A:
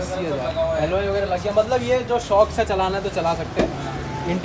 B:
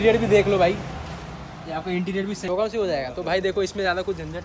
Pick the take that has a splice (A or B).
B